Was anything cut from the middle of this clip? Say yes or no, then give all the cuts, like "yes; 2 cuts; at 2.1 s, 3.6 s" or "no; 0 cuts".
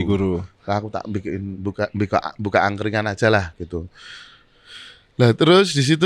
no; 0 cuts